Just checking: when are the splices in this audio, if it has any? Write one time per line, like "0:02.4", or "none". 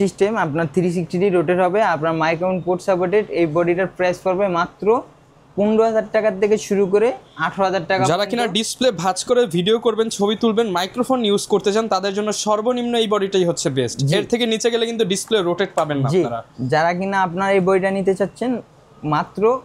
none